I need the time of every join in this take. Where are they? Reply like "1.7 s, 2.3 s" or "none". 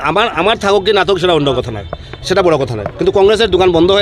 none